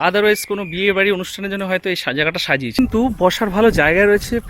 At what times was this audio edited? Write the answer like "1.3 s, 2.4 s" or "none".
2.8 s